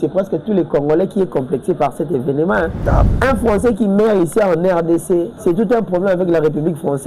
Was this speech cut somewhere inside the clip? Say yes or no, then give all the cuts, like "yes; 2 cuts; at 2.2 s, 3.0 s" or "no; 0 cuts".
yes; 2 cuts; at 3.1 s, 5.3 s